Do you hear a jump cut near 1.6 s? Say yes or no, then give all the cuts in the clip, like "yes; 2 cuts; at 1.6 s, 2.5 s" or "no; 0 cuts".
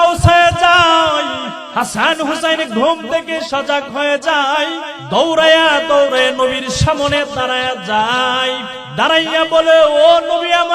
yes; 3 cuts; at 1.6 s, 4.9 s, 8.8 s